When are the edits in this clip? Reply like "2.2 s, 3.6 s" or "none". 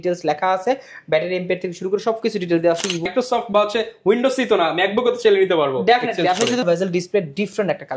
3.1 s, 6.6 s